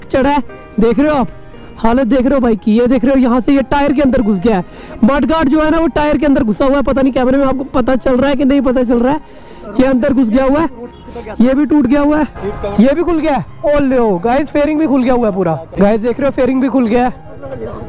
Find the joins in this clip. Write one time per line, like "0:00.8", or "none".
none